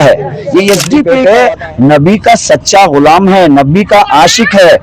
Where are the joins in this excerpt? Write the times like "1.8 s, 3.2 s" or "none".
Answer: 1.1 s